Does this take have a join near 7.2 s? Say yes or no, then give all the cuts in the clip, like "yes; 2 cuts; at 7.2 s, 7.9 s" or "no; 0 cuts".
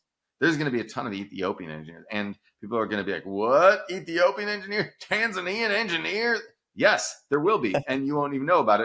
no; 0 cuts